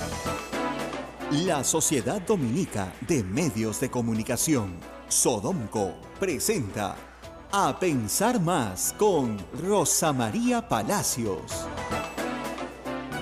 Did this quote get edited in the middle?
yes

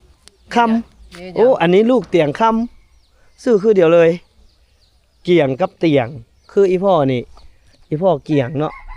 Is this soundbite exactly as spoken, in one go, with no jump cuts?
yes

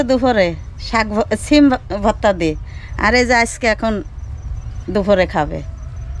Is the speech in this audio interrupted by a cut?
no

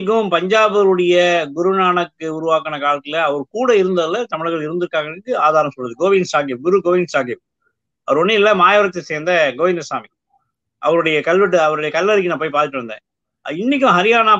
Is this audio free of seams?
yes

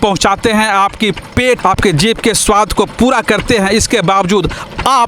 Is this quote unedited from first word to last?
no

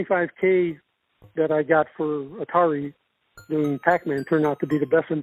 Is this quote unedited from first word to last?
yes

